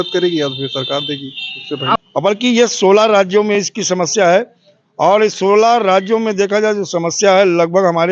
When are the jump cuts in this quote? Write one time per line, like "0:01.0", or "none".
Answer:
0:02.0

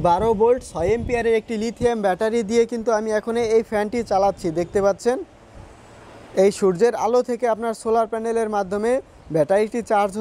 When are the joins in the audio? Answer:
none

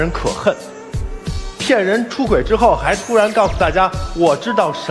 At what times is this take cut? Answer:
none

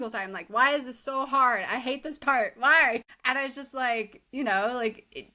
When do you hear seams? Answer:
0:03.1

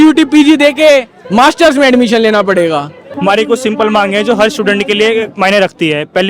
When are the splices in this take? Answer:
0:03.0

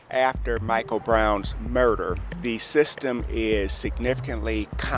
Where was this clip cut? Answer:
0:02.3

